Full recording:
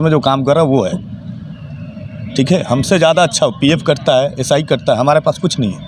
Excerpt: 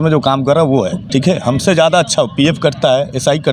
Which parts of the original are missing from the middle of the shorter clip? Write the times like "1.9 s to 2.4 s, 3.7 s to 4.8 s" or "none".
1.0 s to 2.2 s